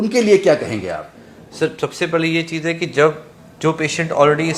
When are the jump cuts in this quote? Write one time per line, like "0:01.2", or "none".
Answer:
none